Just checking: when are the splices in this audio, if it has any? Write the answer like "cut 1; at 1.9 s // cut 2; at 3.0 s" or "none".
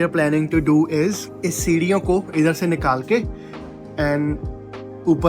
cut 1; at 1.3 s